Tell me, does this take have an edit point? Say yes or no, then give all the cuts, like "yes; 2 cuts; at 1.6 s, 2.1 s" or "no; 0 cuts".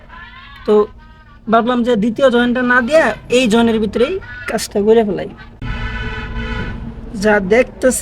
yes; 1 cut; at 5.6 s